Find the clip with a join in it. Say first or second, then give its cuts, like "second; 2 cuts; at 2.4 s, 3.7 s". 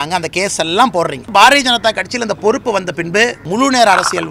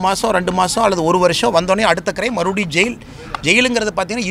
first; 2 cuts; at 1.3 s, 3.4 s